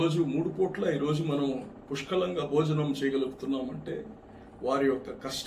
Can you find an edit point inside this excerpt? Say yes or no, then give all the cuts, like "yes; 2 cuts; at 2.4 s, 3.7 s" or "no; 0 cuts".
no; 0 cuts